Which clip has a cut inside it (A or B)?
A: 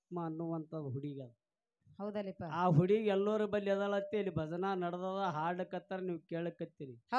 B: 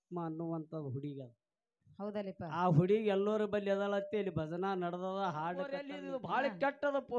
B